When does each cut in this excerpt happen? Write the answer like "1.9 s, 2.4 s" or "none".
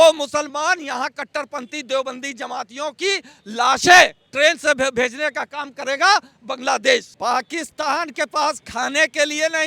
7.1 s